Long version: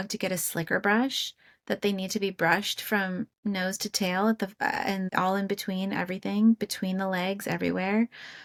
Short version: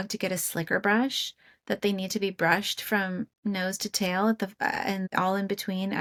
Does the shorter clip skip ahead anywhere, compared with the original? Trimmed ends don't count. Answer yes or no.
no